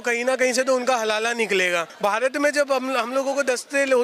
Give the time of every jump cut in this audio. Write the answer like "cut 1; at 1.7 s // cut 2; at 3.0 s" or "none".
cut 1; at 1.9 s